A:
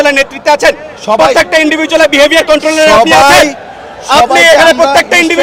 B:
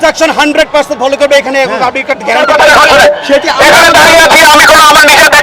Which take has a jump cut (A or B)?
B